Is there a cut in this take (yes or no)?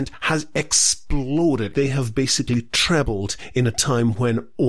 yes